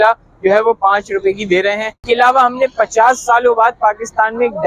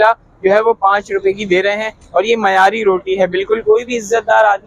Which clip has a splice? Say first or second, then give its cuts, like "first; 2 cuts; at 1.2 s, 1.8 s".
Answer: first; 1 cut; at 1.9 s